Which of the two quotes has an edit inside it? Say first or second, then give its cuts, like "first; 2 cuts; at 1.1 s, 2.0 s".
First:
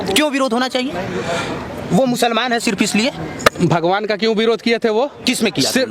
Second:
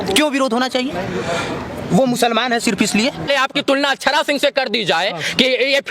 second; 1 cut; at 3.3 s